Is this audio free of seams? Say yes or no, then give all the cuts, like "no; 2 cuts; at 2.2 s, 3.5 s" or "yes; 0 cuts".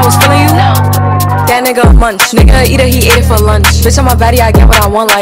yes; 0 cuts